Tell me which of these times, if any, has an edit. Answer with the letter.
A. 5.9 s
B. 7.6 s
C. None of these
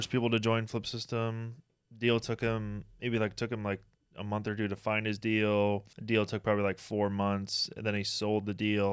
A